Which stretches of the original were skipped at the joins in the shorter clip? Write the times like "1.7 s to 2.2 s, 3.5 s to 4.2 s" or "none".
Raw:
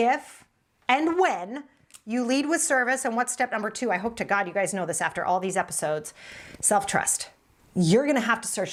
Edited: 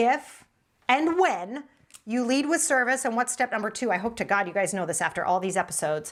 none